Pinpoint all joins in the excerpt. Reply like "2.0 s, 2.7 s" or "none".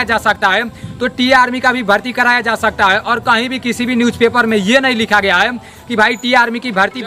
none